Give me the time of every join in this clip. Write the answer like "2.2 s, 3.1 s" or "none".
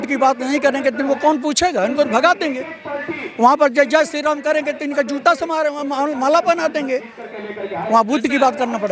none